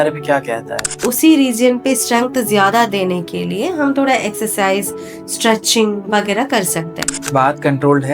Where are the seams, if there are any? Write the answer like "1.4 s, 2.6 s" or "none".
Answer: 1.0 s, 7.2 s